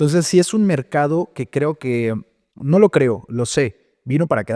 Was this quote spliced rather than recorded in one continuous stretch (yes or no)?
no